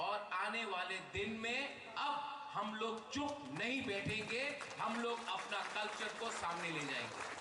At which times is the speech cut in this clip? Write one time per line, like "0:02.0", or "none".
0:03.5